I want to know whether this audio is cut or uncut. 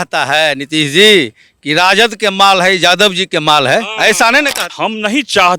cut